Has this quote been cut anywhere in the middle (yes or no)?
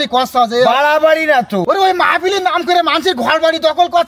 yes